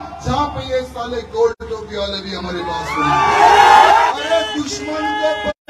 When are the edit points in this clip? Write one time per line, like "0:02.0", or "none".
0:04.1